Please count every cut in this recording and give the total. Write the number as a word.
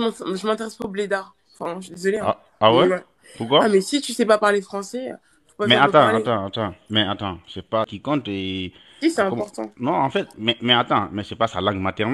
one